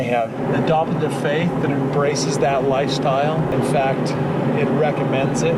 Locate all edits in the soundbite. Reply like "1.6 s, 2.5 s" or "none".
3.5 s